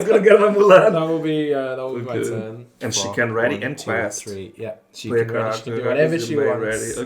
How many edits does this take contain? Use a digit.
1